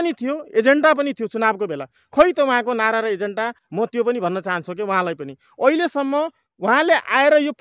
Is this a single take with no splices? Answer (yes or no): yes